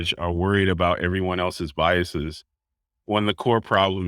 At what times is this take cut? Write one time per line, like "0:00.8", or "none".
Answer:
none